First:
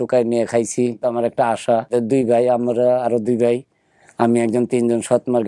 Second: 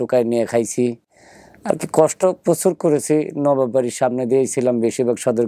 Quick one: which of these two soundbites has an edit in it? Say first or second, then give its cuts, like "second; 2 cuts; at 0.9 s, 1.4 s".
first; 2 cuts; at 1.0 s, 1.9 s